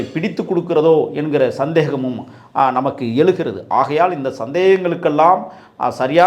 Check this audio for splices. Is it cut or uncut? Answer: uncut